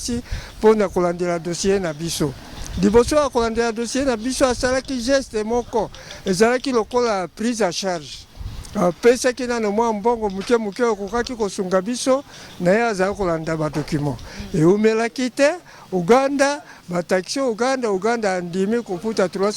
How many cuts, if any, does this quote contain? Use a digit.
0